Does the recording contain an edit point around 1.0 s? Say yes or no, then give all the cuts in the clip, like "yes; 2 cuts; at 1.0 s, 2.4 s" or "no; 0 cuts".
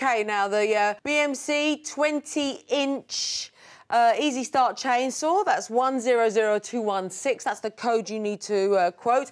yes; 1 cut; at 1.0 s